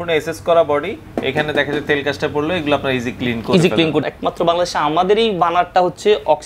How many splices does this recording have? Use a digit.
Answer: 1